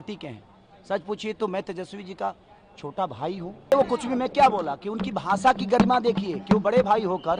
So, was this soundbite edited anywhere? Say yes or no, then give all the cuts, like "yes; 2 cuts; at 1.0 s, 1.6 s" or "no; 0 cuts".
yes; 1 cut; at 3.7 s